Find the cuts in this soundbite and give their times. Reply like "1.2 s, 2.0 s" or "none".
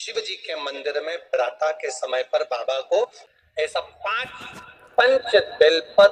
3.3 s